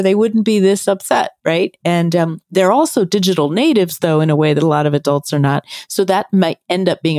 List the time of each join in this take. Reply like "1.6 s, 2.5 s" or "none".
none